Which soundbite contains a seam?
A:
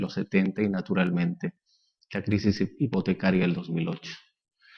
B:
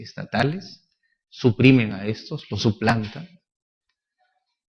A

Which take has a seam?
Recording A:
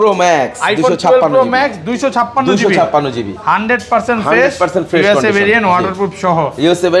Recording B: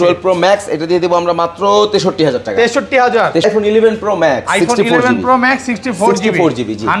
B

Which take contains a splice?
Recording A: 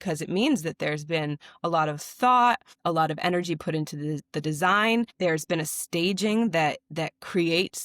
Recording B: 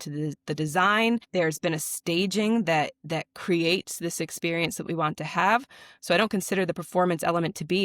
A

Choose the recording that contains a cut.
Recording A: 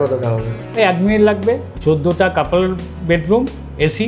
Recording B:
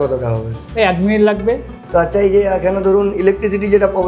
A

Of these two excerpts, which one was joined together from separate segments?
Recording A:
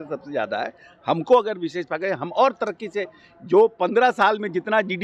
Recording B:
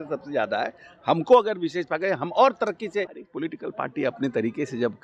B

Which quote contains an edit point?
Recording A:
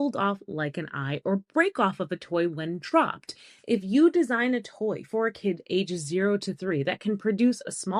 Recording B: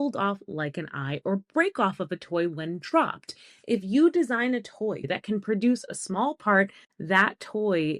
B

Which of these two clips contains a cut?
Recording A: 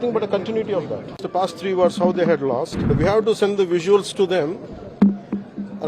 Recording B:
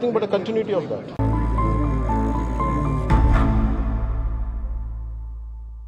A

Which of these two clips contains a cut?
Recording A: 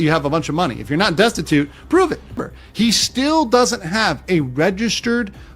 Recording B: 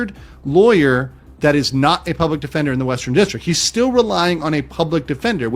A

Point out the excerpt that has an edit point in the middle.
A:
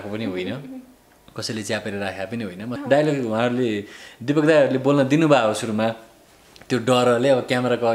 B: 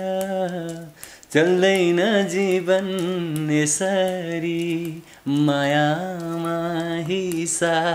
A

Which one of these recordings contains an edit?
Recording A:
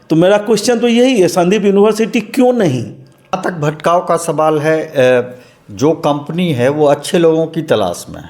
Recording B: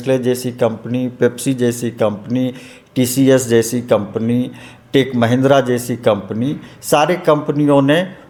A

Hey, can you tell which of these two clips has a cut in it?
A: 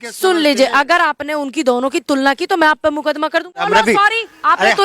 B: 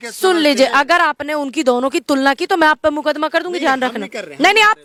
A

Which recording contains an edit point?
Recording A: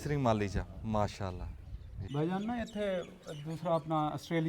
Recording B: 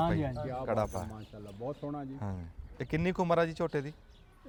A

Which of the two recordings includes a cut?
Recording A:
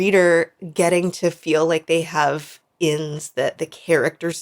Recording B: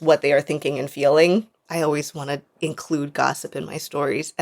B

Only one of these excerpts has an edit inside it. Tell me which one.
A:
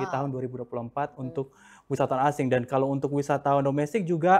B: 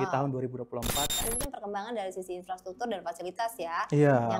B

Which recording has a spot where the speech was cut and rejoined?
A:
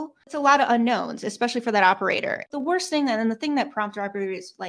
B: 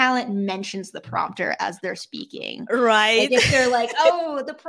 A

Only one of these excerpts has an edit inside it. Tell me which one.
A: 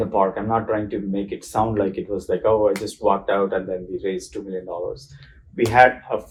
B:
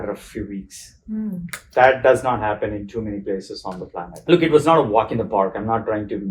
B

